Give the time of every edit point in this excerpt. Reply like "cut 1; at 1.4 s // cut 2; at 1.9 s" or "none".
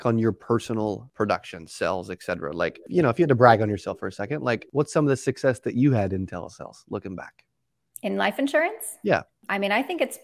cut 1; at 1.1 s // cut 2; at 2.8 s // cut 3; at 4.6 s // cut 4; at 9.4 s